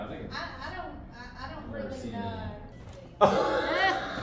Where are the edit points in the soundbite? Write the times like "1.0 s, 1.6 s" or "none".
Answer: 2.7 s